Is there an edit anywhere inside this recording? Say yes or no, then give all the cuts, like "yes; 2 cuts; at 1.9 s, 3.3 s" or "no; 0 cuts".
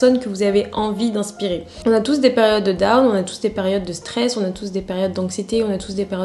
yes; 1 cut; at 1.7 s